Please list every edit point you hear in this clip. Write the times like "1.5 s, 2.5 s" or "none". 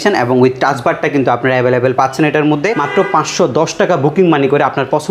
2.8 s